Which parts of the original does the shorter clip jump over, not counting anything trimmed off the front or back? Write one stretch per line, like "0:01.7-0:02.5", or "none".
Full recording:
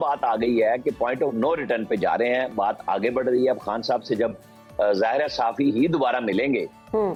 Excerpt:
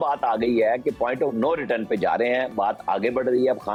none